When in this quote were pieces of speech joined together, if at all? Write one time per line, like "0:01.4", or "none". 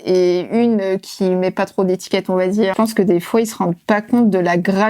0:02.7

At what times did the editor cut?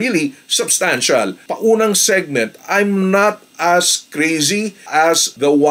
0:01.4

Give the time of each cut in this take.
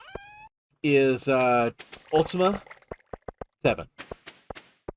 0:01.9

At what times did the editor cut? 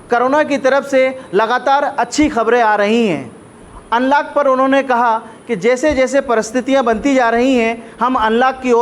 none

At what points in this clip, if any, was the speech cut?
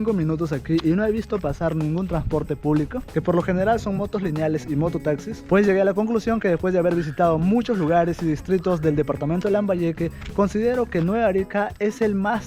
none

